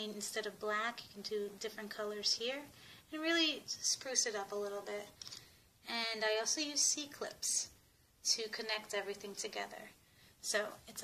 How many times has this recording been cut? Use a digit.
1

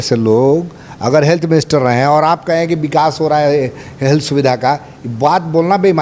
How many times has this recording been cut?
0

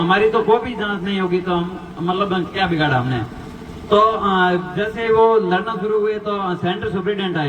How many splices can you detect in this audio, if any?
0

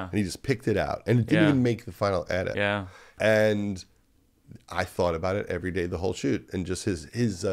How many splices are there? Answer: 1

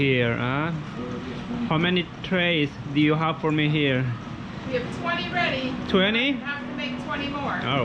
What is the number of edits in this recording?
0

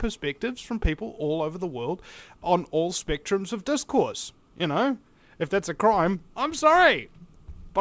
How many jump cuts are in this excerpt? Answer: 1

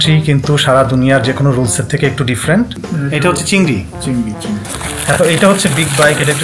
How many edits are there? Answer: 1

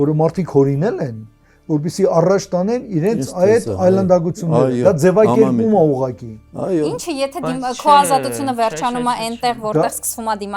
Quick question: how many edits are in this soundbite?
0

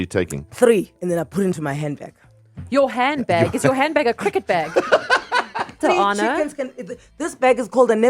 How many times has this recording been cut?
2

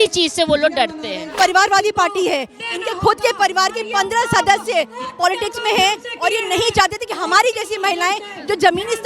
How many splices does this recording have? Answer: 1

